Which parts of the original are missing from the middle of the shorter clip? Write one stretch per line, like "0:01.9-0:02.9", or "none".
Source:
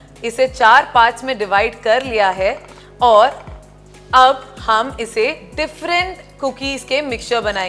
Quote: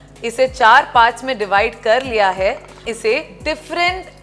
0:02.8-0:05.0